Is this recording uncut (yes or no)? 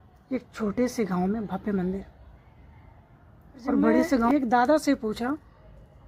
no